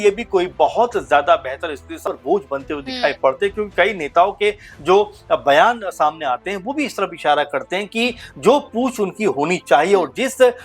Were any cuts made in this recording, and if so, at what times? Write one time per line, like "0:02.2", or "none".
0:02.0